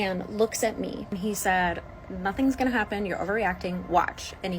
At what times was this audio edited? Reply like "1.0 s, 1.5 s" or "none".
1.2 s

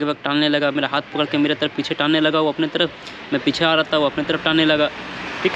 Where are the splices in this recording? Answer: none

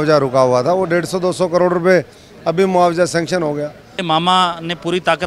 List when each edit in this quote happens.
3.9 s

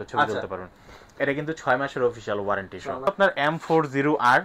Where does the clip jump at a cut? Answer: 3.1 s

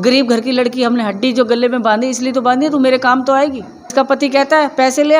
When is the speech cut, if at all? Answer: 3.9 s

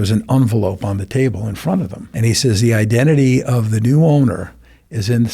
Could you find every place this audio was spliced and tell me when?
2.0 s

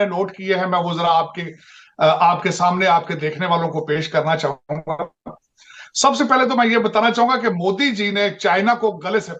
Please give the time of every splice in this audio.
none

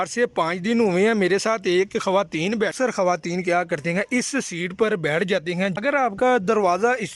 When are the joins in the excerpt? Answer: 2.4 s, 5.7 s

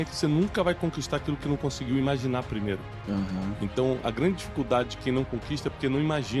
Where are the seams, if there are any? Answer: none

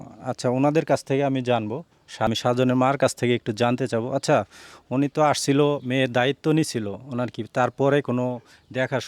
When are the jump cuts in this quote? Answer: 2.3 s

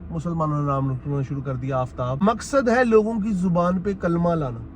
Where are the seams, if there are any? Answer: 2.2 s

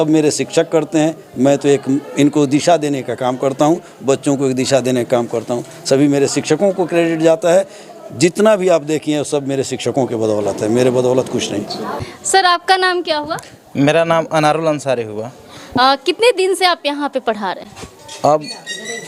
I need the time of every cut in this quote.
none

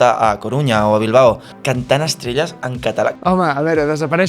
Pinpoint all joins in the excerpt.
1.5 s, 3.1 s

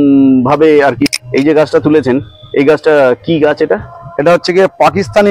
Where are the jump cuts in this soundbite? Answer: 1.1 s

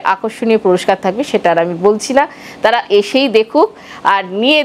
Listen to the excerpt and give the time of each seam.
none

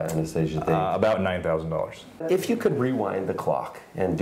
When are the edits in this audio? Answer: 2.2 s

